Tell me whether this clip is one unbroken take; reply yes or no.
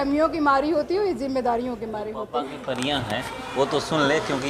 no